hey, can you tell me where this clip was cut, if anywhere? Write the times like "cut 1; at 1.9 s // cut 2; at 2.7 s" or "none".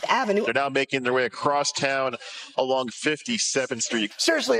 none